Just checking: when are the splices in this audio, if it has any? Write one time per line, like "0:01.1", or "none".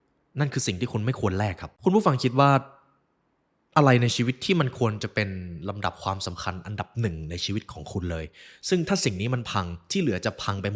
0:01.7